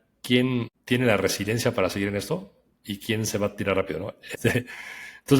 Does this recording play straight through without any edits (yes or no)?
no